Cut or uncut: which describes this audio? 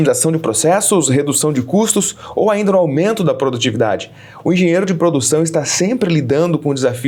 uncut